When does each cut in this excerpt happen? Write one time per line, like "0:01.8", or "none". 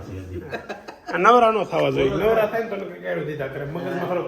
none

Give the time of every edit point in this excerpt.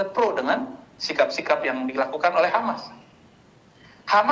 none

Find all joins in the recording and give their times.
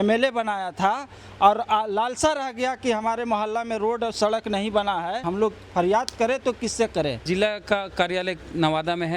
0:05.2
0:07.2

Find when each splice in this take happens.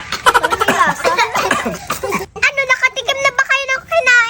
0:02.3

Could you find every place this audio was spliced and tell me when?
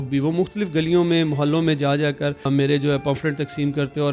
0:02.5

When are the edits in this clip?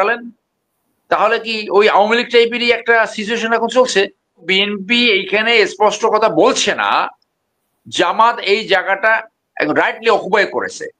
0:04.5

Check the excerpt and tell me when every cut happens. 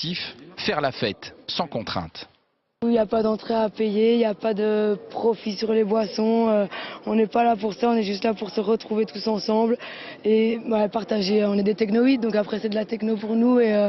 0:02.7

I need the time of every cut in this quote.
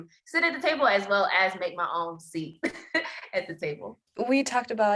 none

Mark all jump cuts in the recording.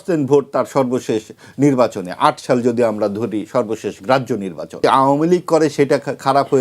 0:04.8

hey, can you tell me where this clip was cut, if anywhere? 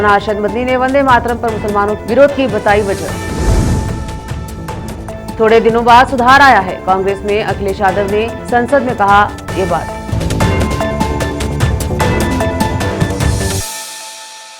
none

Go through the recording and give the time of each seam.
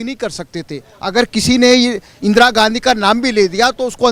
none

